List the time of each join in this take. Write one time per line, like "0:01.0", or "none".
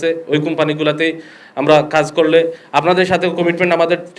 none

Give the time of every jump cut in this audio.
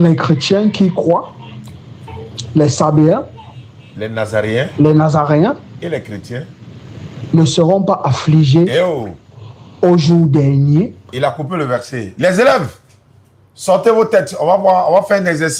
none

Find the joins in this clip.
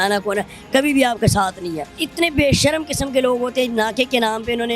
0:02.0

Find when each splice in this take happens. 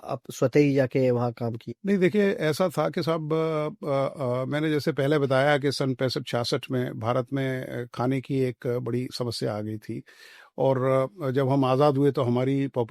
none

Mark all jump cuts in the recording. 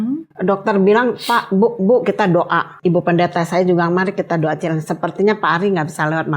0:02.7

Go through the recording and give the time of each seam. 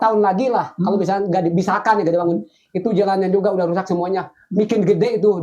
none

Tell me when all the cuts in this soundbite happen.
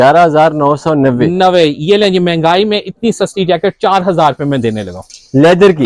none

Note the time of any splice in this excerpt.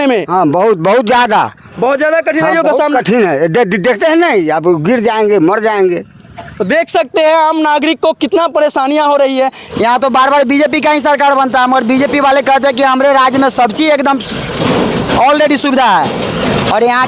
none

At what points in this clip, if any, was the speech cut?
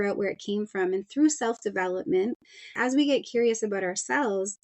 0:02.7

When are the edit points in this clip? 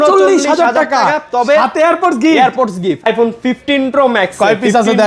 0:03.1

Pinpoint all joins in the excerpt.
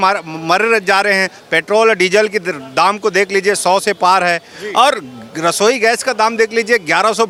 none

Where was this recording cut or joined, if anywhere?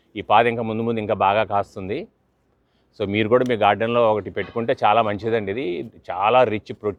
none

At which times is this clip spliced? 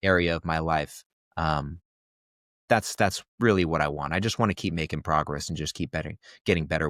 none

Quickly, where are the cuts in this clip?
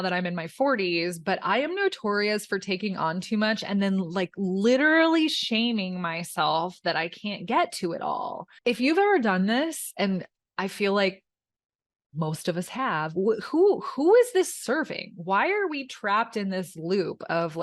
0:08.5

